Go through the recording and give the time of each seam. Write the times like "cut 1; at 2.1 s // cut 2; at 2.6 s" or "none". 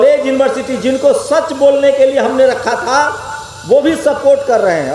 none